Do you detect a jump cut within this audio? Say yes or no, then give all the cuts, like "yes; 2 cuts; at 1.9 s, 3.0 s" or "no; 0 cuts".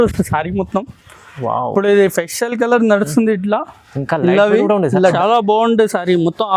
yes; 1 cut; at 5.1 s